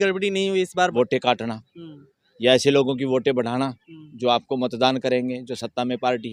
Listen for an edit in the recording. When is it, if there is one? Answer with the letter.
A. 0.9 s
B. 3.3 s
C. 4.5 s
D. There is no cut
A